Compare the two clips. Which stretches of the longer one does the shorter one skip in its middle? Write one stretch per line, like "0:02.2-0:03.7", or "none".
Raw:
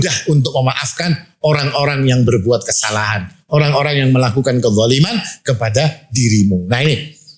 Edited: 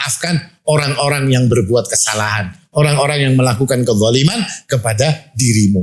none